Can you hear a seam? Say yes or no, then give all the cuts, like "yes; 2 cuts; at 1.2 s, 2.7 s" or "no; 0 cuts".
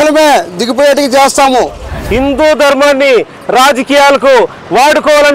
yes; 1 cut; at 1.9 s